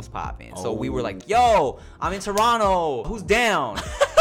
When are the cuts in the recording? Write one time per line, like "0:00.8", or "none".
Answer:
0:01.2
0:03.1